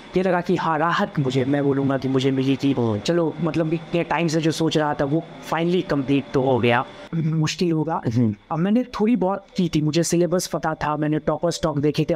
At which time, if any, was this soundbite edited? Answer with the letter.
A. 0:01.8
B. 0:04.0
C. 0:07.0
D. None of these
C